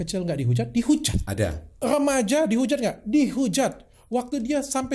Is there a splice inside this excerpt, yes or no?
yes